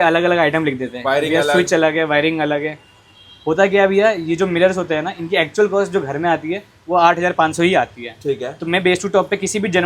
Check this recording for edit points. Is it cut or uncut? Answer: uncut